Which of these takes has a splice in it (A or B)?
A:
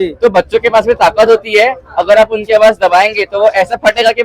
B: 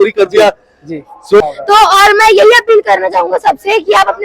B